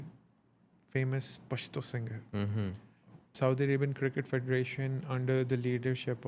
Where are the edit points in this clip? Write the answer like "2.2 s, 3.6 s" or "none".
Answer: 3.2 s